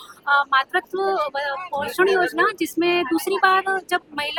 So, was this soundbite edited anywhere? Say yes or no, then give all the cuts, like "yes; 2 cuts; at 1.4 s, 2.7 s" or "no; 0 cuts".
no; 0 cuts